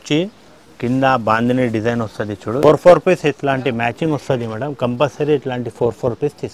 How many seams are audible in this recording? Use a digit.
1